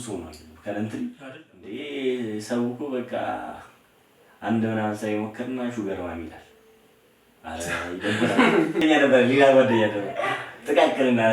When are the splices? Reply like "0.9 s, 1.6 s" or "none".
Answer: 1.2 s, 8.8 s